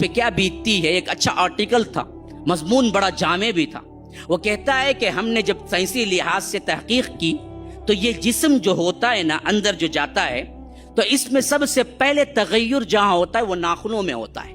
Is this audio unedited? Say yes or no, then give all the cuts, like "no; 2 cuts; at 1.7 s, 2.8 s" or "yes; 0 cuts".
yes; 0 cuts